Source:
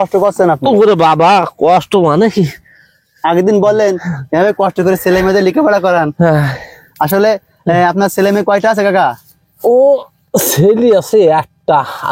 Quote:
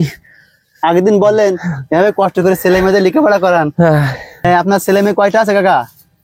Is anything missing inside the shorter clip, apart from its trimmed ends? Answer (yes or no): yes